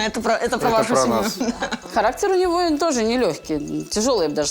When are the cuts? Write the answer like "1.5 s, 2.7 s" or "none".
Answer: 1.7 s